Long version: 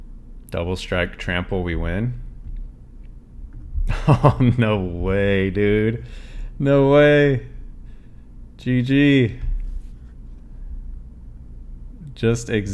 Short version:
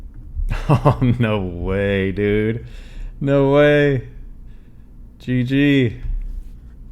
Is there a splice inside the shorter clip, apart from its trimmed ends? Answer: no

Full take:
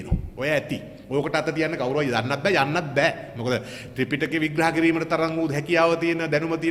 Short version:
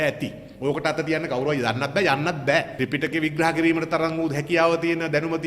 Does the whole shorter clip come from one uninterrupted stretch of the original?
no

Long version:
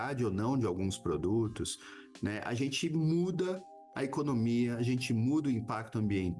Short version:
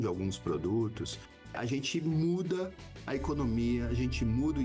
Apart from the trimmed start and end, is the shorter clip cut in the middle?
yes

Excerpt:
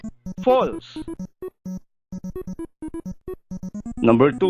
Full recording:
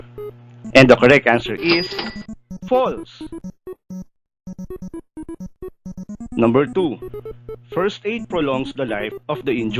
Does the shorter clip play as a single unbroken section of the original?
no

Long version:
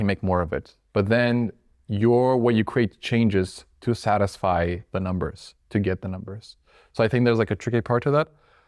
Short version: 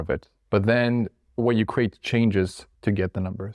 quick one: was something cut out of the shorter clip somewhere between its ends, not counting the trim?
yes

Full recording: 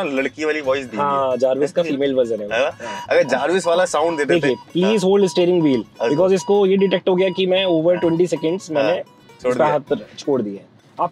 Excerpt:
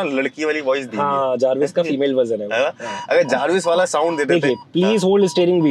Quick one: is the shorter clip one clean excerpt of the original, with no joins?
yes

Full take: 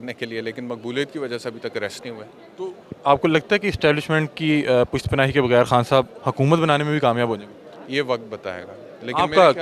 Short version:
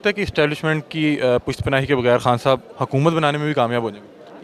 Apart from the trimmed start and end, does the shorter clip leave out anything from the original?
no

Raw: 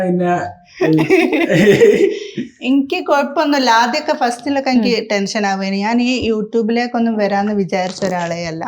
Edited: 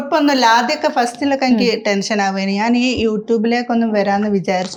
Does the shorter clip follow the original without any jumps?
yes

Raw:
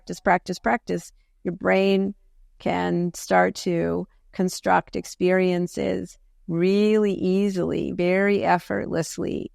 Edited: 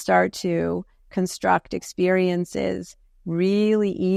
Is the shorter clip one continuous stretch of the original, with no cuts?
yes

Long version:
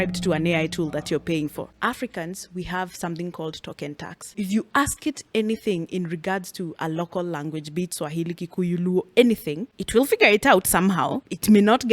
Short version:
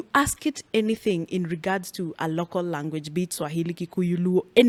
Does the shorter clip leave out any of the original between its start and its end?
no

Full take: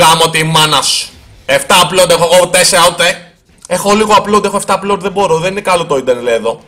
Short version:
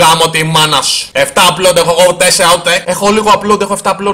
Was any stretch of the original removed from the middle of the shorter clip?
yes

